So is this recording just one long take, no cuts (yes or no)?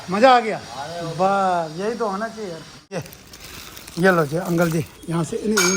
no